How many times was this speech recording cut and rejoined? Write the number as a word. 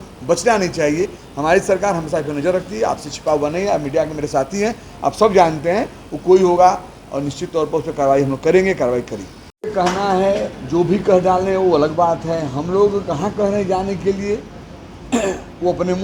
zero